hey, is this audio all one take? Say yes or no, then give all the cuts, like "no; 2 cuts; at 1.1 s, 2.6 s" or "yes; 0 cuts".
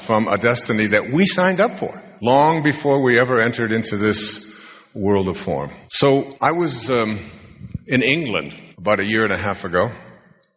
yes; 0 cuts